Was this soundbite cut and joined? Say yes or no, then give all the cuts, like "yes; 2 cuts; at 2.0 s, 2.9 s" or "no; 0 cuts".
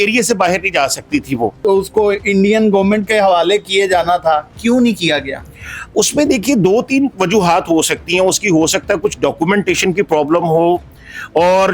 yes; 1 cut; at 1.6 s